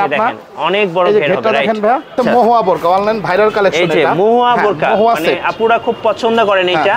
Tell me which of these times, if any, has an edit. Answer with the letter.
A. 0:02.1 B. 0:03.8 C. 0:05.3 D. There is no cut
A